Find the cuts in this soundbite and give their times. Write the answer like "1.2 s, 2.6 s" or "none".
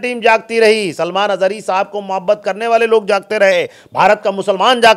none

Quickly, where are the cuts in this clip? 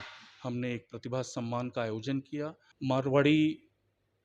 2.6 s

